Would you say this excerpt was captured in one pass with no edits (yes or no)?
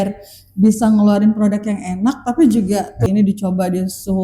no